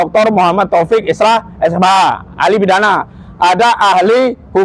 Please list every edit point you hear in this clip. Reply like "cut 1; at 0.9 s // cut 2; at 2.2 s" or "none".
none